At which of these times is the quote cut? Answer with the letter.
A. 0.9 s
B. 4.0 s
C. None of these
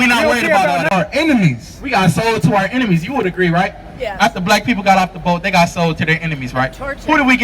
A